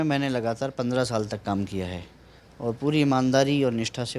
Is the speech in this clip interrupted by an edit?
no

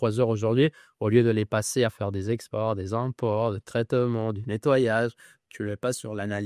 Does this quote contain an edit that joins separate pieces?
no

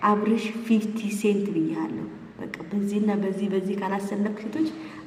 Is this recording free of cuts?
yes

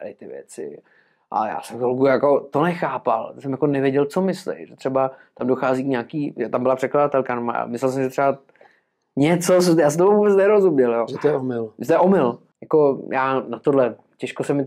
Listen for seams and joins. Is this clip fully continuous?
no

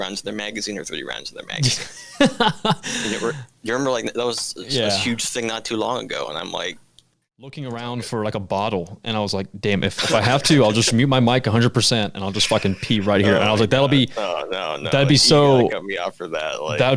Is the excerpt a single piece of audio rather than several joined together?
no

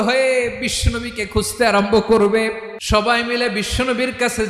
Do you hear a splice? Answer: yes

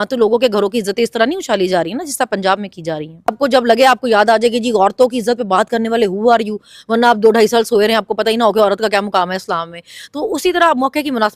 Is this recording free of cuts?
no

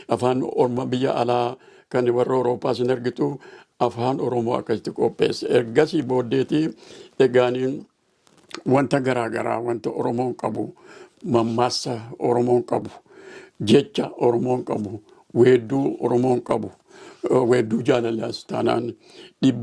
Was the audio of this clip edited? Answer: no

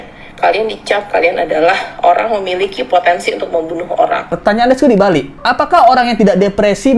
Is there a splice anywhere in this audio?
yes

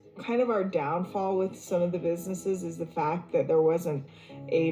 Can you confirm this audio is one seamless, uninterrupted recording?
yes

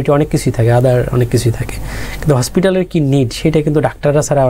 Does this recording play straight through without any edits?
yes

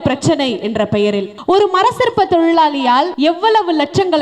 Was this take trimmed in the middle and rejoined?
yes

